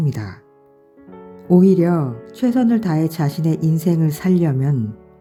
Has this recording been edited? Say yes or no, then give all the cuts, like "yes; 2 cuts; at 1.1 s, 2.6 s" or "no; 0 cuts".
no; 0 cuts